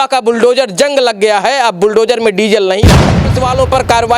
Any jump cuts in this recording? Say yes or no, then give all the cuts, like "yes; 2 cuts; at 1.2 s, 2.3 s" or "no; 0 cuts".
yes; 1 cut; at 3.0 s